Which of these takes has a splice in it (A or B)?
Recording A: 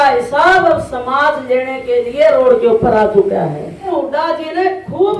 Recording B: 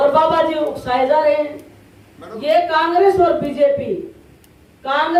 A